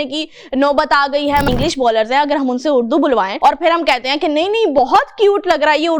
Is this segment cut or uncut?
cut